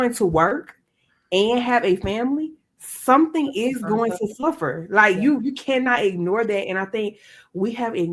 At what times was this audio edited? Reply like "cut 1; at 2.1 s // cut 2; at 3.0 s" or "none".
none